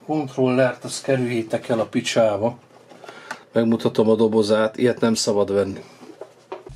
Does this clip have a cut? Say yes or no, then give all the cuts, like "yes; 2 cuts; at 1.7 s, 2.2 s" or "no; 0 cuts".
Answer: no; 0 cuts